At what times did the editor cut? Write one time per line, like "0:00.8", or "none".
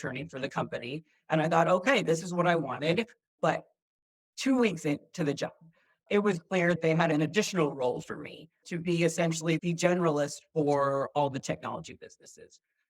0:03.2
0:08.6